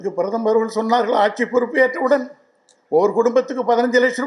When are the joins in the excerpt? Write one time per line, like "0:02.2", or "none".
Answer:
none